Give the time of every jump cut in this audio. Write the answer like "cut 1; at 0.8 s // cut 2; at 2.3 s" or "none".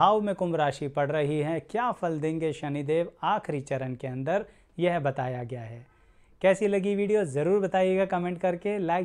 none